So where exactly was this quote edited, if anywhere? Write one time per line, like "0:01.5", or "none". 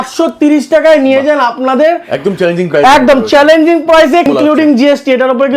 0:04.3